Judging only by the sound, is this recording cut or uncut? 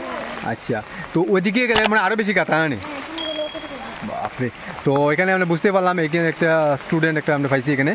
uncut